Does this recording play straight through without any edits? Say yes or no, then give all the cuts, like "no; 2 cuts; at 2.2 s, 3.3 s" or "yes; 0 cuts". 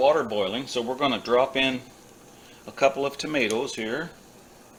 yes; 0 cuts